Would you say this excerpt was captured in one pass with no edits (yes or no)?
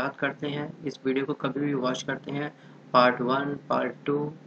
yes